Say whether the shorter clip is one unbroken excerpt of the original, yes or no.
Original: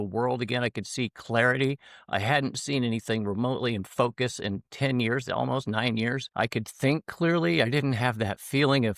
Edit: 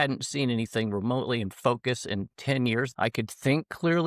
no